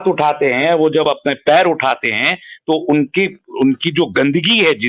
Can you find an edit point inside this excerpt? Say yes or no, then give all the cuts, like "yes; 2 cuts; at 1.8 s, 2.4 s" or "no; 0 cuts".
no; 0 cuts